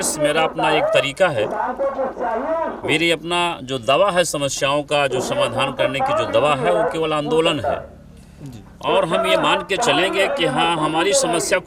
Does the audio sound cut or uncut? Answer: uncut